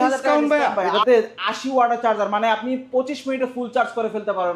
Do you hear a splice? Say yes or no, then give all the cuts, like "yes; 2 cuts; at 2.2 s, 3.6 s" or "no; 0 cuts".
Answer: yes; 1 cut; at 1.0 s